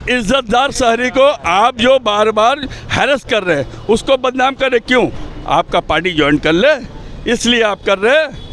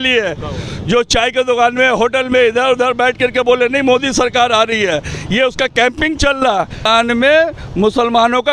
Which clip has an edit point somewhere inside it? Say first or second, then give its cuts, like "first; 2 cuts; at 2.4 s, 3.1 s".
second; 1 cut; at 6.8 s